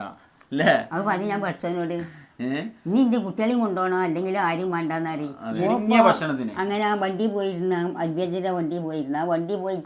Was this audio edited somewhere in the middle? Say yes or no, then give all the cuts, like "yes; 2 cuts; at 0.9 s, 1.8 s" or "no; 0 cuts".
yes; 1 cut; at 5.4 s